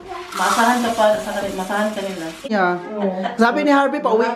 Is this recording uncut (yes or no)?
no